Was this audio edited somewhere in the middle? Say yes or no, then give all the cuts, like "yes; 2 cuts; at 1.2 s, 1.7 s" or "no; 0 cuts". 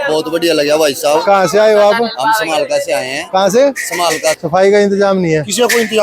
yes; 1 cut; at 4.4 s